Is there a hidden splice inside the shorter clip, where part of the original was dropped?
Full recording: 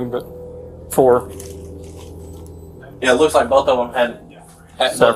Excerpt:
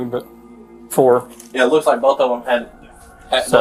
yes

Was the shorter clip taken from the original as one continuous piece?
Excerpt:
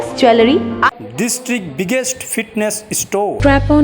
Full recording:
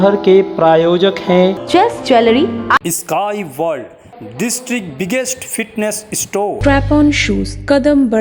no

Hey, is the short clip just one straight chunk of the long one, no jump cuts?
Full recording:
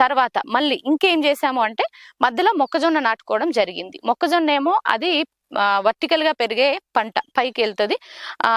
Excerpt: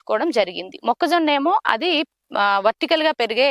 yes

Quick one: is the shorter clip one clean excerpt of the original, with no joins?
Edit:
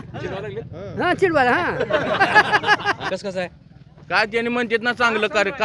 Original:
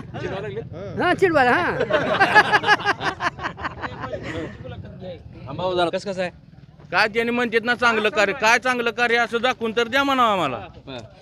no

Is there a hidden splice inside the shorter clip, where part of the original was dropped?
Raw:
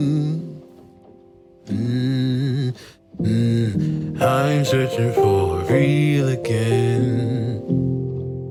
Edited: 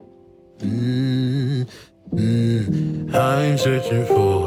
no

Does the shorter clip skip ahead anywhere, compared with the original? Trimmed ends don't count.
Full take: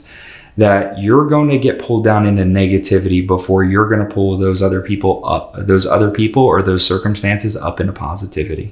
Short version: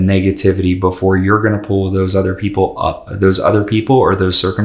no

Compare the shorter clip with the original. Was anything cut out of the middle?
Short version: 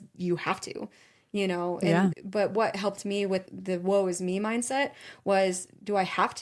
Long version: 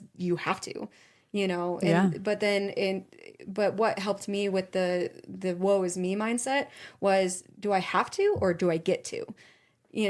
yes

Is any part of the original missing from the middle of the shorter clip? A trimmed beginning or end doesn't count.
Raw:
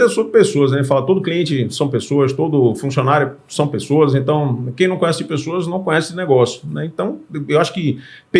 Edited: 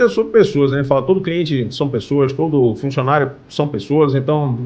no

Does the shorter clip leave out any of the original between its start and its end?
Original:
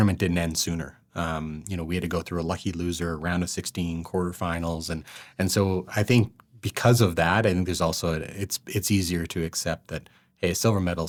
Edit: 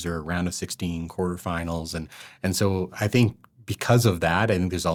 no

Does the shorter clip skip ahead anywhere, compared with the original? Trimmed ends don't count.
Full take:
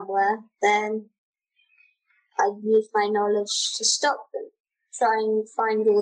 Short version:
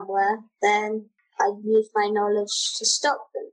yes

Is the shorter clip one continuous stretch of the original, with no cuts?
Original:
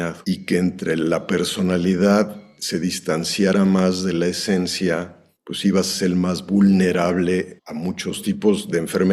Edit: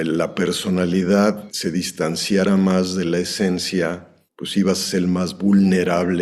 no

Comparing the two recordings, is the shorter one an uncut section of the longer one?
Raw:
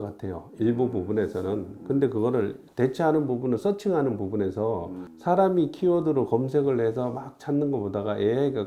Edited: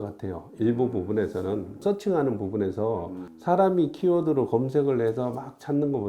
no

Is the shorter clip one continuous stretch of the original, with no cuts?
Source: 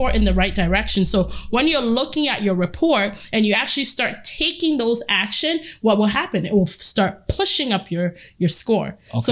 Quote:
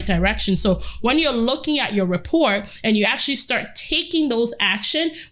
yes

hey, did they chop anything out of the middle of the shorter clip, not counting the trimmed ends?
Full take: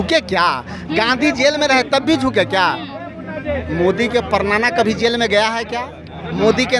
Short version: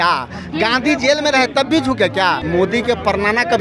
yes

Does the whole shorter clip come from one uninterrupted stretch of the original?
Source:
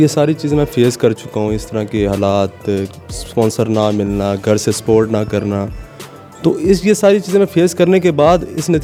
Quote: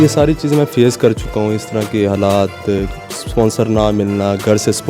yes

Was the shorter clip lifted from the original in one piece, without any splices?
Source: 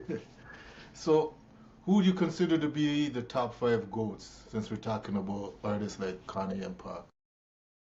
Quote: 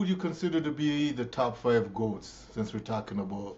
yes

